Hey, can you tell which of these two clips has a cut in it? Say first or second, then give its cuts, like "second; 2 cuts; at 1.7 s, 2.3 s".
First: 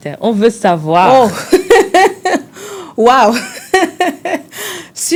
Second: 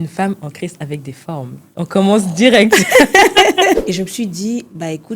second; 1 cut; at 3.8 s